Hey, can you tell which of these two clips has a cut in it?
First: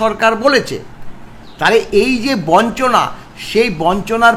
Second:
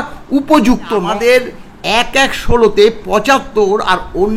second; 1 cut; at 1.0 s

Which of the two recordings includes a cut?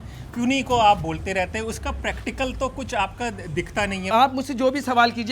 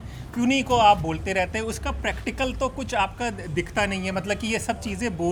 first; 1 cut; at 4.1 s

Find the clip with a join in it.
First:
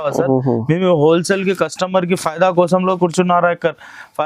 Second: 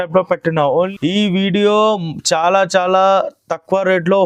second; 1 cut; at 0.9 s

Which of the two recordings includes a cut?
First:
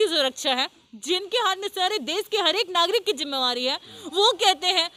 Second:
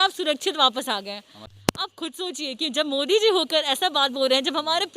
second; 1 cut; at 1.6 s

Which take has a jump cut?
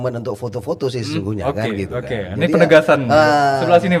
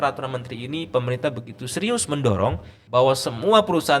second; 1 cut; at 2.7 s

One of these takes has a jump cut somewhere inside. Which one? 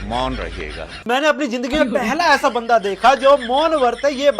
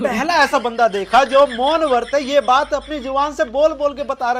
first; 1 cut; at 1.0 s

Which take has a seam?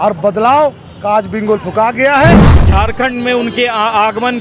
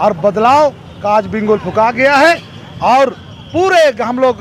first; 1 cut; at 2.5 s

